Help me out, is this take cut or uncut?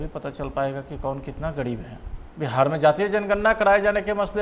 cut